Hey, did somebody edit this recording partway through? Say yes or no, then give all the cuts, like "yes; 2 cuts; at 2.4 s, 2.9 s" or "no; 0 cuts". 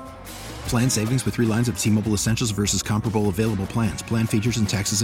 no; 0 cuts